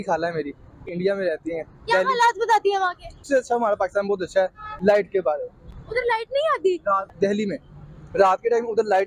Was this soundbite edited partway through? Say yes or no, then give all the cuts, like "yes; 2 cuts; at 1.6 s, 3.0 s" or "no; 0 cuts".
yes; 3 cuts; at 0.9 s, 3.2 s, 7.0 s